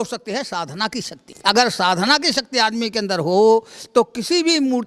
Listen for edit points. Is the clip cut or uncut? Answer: cut